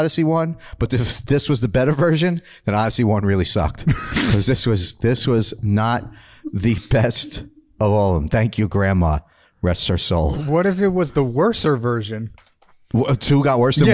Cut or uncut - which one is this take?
uncut